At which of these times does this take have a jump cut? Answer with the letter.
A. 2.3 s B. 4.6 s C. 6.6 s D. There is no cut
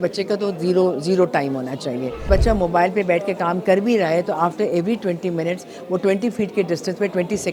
A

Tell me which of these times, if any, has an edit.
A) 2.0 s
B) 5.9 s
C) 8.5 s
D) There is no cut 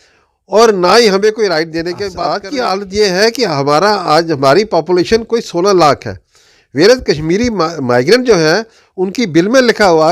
A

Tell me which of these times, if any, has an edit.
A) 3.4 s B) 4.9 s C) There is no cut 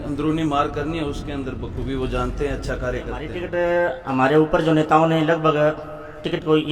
A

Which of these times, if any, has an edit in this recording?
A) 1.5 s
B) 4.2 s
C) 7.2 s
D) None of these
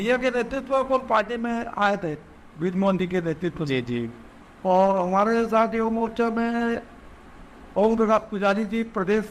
D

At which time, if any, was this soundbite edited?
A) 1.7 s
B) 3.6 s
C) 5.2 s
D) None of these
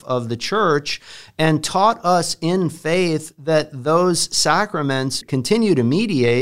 C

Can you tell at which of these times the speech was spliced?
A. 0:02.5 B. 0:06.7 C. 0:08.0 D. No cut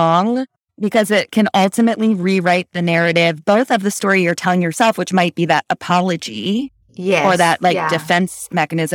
D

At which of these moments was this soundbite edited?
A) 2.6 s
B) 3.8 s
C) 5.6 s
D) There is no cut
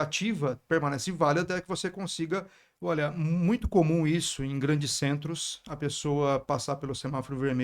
A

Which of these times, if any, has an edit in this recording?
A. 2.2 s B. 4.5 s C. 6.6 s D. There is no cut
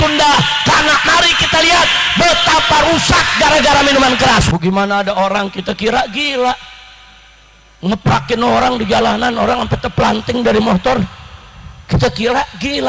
B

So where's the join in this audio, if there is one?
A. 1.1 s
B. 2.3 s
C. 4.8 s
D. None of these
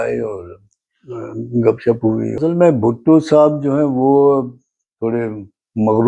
B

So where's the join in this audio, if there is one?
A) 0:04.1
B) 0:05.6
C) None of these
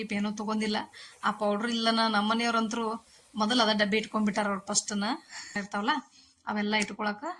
B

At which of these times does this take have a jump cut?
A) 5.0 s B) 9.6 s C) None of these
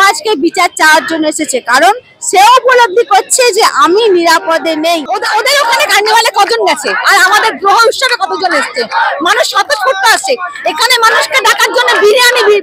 A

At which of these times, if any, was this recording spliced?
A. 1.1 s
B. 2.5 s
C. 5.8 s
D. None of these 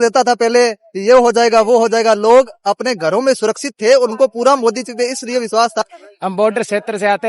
C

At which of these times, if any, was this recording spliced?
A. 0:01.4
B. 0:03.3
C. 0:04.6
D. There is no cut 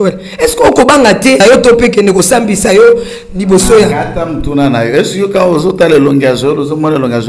A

